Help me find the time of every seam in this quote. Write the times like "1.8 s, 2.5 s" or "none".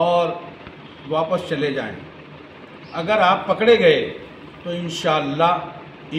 none